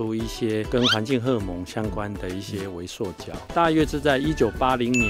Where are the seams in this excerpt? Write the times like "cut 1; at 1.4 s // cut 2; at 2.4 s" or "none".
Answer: cut 1; at 3.4 s